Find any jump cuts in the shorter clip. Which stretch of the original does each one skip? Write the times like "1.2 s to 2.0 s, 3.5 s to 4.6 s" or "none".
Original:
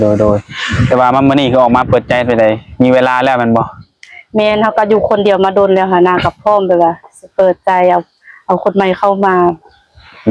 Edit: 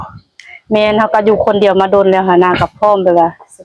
none